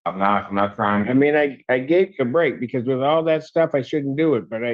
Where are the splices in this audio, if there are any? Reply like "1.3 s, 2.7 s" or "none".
none